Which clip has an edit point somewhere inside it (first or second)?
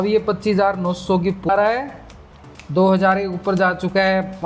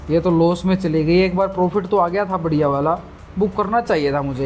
first